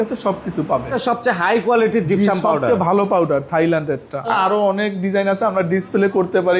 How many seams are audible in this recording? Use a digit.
2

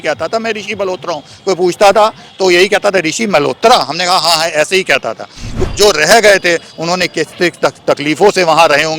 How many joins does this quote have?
1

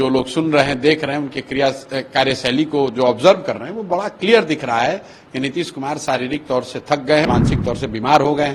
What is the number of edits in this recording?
1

